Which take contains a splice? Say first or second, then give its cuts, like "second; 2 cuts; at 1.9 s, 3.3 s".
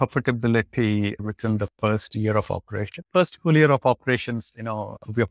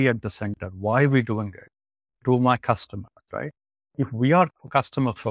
first; 1 cut; at 1.2 s